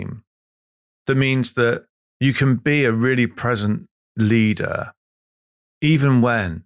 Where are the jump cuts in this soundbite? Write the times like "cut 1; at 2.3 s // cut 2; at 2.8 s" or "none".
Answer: none